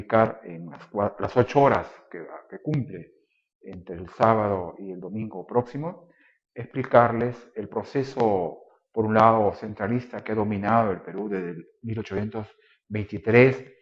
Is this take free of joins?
no; 1 cut; at 4.6 s

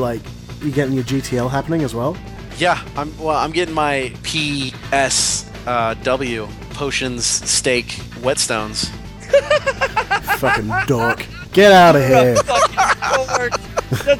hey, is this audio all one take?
no; 3 cuts; at 4.4 s, 6.6 s, 8.0 s

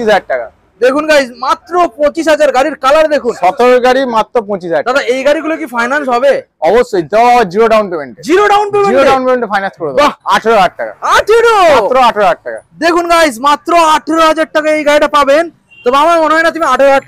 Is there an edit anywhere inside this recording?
yes; 1 cut; at 10.2 s

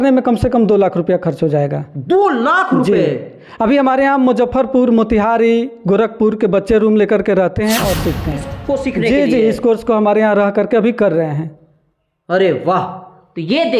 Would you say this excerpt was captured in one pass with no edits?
no; 1 cut; at 8.5 s

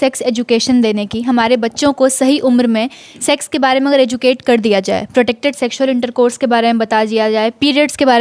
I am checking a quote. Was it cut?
no; 0 cuts

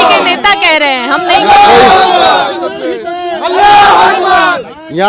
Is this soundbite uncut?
yes; 0 cuts

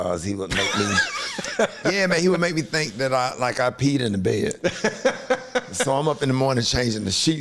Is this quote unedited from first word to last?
yes; 0 cuts

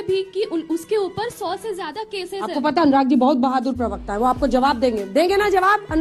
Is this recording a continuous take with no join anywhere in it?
yes; 0 cuts

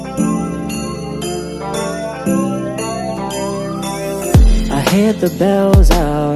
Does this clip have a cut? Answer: no; 0 cuts

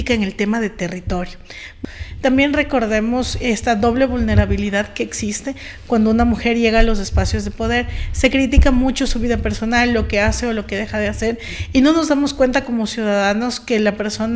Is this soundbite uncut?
no; 1 cut; at 1.7 s

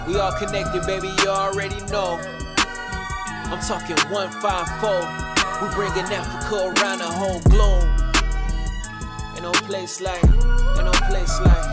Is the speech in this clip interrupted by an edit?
no; 0 cuts

